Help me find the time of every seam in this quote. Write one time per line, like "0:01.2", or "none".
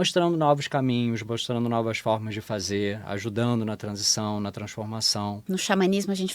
0:05.4